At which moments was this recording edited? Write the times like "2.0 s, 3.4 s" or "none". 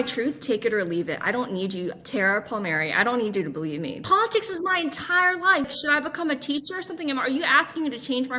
4.0 s, 5.7 s